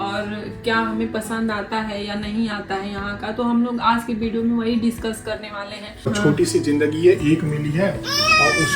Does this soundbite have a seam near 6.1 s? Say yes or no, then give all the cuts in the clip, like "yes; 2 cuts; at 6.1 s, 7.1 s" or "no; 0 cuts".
yes; 1 cut; at 6.1 s